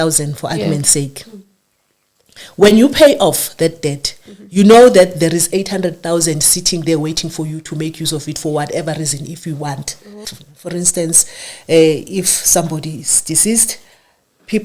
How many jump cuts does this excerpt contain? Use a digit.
1